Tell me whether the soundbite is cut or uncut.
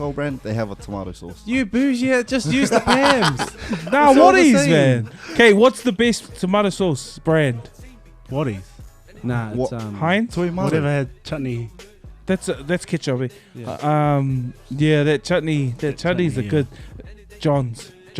uncut